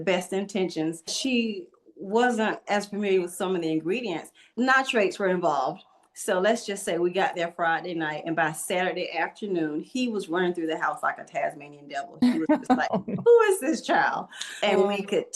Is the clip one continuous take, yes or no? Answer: no